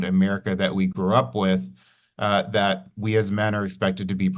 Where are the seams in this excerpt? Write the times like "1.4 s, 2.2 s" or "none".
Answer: none